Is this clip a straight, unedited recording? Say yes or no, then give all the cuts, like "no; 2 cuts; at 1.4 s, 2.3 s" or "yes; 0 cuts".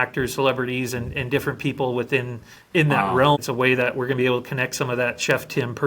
no; 1 cut; at 3.4 s